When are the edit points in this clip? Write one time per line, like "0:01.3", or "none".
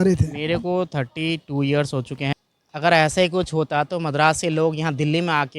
0:02.3